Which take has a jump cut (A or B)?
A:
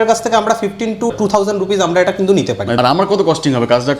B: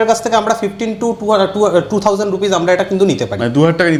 A